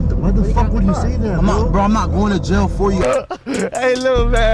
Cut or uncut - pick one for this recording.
cut